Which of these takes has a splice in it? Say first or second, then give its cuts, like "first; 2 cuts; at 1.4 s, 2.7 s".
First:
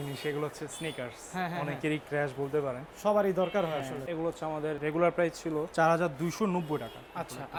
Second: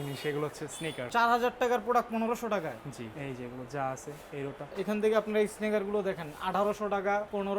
second; 3 cuts; at 1.0 s, 3.1 s, 4.6 s